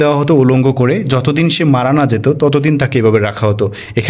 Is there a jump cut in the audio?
no; 0 cuts

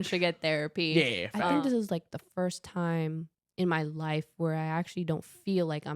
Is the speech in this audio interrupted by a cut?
yes; 1 cut; at 1.5 s

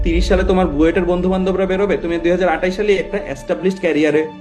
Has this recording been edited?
no; 0 cuts

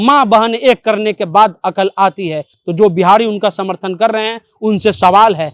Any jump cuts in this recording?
no; 0 cuts

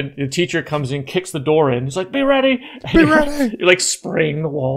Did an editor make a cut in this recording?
no; 0 cuts

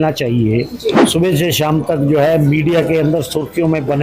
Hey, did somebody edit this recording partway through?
yes; 1 cut; at 1.0 s

